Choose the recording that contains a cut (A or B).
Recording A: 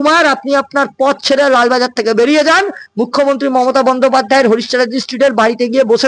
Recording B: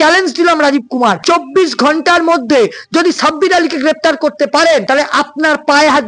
B